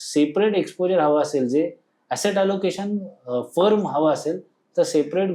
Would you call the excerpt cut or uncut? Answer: uncut